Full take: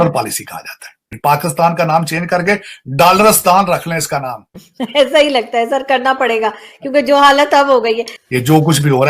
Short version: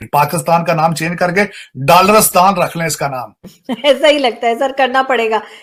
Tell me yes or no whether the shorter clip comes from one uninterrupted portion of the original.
yes